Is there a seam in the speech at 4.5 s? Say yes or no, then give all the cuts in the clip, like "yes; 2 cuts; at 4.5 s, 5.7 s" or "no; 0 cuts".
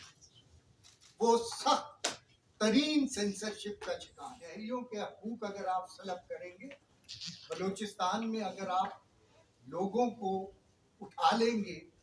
yes; 1 cut; at 4.5 s